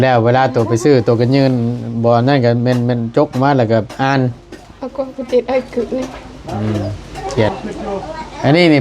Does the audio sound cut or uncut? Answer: cut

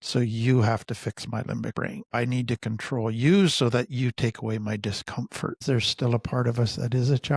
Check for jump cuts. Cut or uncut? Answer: cut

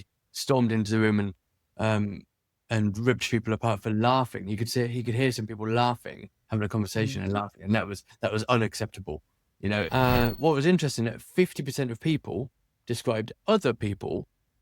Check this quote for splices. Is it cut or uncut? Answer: cut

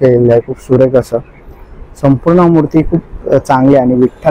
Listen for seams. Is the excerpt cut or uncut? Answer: uncut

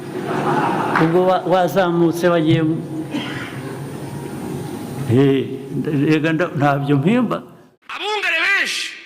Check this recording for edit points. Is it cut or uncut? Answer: cut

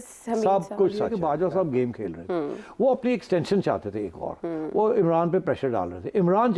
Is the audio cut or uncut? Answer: cut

